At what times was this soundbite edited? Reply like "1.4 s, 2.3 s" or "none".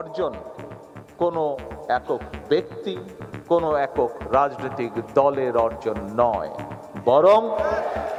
none